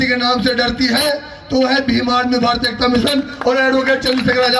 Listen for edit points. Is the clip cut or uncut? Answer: uncut